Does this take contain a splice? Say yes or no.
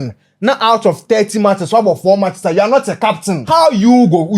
yes